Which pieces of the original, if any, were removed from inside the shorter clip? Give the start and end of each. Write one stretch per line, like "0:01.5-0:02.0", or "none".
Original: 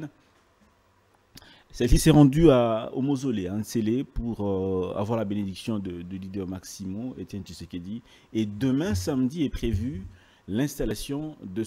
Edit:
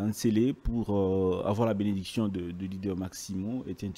none